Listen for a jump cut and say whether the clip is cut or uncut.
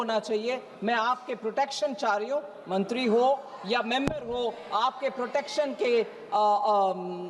uncut